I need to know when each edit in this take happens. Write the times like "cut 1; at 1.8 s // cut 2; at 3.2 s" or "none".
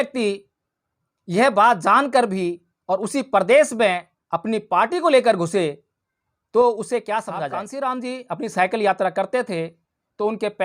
cut 1; at 7.7 s